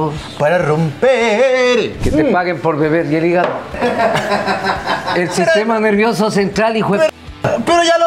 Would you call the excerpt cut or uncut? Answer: cut